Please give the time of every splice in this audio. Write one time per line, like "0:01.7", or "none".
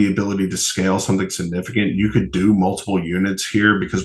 none